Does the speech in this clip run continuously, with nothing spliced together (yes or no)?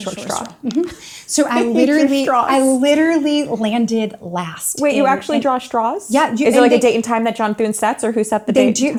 yes